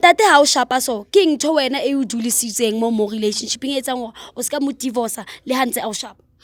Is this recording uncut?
yes; 0 cuts

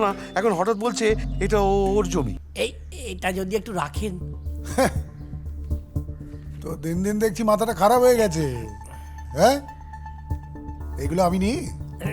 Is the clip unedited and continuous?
no; 1 cut; at 2.4 s

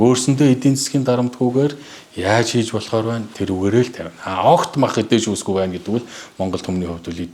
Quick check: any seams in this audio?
no; 0 cuts

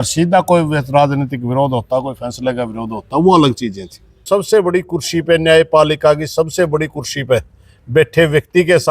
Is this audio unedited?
no; 1 cut; at 4.2 s

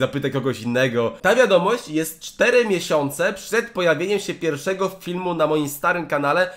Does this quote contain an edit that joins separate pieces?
yes; 1 cut; at 1.2 s

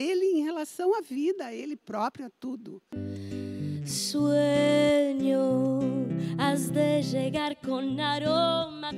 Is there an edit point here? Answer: yes; 1 cut; at 2.9 s

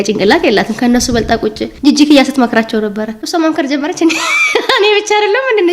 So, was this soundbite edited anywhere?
yes; 1 cut; at 3.2 s

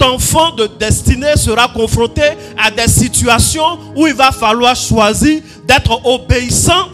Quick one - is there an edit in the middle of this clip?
no; 0 cuts

